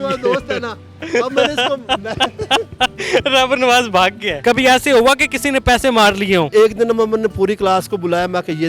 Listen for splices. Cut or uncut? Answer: cut